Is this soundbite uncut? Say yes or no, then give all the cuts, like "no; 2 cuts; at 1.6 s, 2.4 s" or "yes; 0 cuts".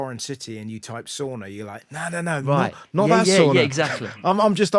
yes; 0 cuts